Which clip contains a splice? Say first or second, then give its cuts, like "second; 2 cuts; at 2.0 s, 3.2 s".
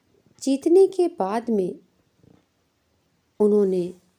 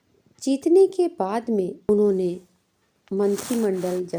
second; 1 cut; at 1.9 s